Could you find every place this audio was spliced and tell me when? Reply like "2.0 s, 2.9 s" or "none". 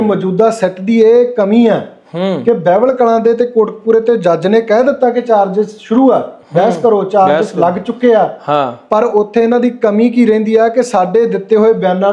none

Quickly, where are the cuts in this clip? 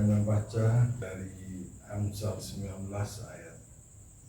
1.0 s

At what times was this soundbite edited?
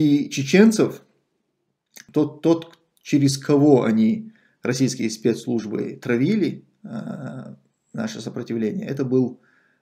2.0 s

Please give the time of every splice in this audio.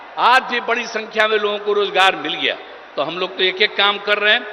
none

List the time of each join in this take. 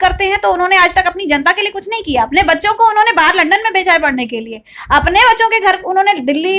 none

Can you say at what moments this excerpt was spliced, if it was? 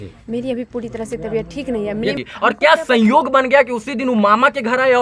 2.2 s

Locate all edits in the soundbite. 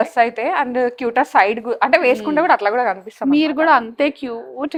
none

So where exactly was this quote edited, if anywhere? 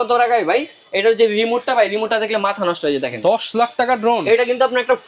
none

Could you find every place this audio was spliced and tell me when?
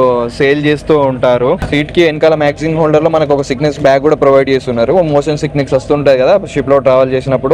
1.6 s

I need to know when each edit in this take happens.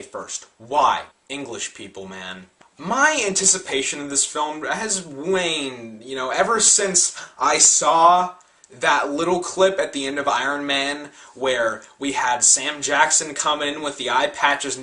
6.9 s

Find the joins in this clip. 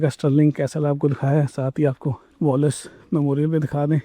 2.2 s

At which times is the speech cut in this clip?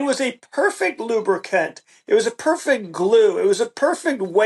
none

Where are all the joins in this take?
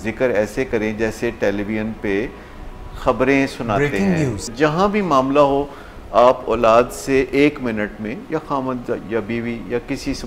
4.5 s

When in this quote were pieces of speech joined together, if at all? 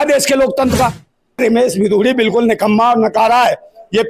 1.4 s

